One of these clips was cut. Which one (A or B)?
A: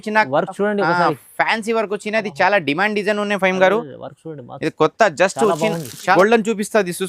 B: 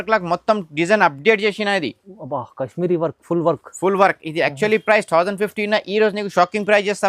A